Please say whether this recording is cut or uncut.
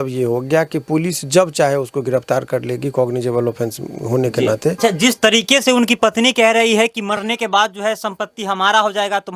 cut